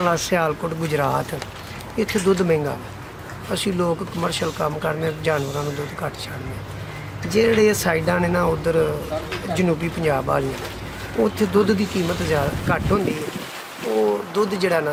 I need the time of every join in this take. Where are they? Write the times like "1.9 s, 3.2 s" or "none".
none